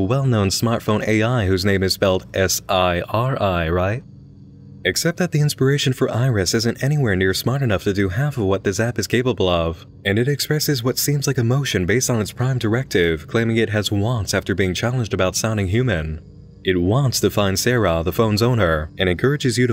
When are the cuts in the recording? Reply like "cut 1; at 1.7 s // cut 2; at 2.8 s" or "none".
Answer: cut 1; at 5.1 s